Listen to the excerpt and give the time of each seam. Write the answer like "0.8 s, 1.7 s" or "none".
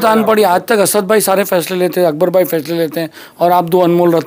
none